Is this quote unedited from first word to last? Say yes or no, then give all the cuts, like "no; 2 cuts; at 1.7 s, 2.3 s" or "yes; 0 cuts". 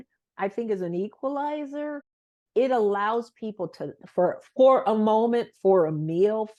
yes; 0 cuts